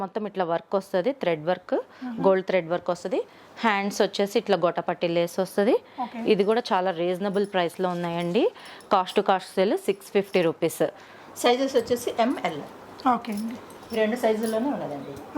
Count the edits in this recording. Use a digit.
0